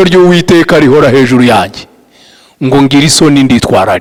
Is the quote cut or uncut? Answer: uncut